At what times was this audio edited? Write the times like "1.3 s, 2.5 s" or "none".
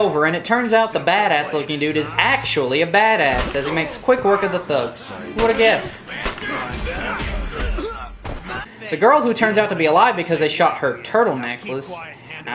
8.4 s